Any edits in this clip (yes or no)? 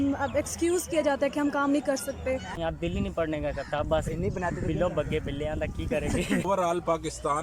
yes